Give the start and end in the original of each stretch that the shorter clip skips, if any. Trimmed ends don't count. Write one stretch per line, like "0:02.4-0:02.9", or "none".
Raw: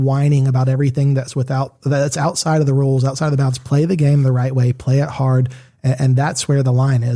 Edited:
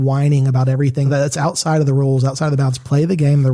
0:01.1-0:01.9